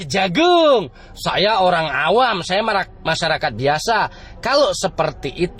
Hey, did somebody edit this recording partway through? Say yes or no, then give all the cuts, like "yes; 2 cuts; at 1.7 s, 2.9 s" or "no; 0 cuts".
no; 0 cuts